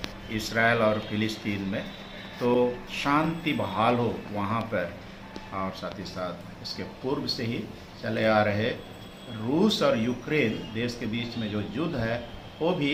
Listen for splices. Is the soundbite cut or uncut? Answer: uncut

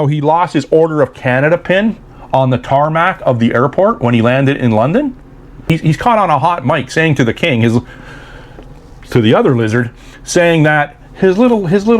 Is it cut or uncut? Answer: cut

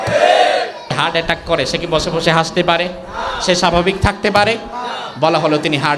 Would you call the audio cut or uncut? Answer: cut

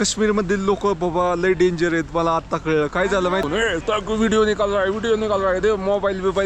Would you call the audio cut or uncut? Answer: cut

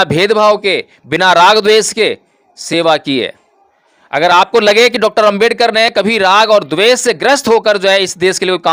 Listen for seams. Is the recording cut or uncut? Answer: uncut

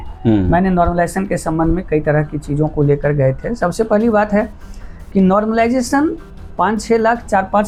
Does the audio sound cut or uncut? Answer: uncut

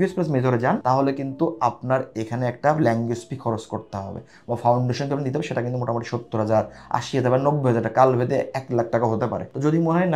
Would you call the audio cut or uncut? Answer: uncut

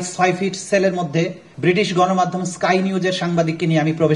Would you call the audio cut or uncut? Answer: cut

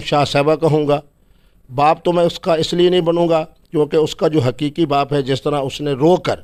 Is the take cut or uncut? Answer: uncut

